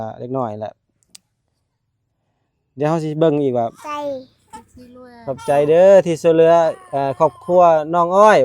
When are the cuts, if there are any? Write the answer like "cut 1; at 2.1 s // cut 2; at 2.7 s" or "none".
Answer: cut 1; at 3.8 s